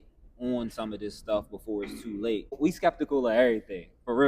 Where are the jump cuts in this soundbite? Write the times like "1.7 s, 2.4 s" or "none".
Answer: 2.6 s